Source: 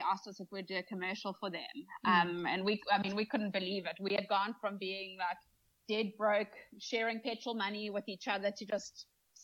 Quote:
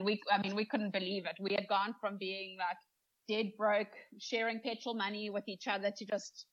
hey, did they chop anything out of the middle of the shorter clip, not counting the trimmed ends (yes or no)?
no